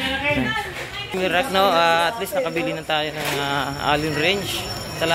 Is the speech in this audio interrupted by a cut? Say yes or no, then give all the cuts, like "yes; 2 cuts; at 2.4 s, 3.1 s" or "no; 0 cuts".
no; 0 cuts